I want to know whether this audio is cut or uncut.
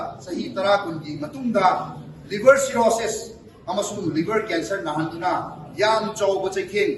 uncut